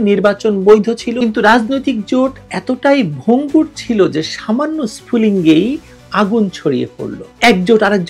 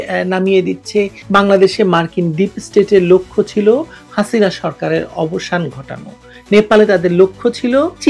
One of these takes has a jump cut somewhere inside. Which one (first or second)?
second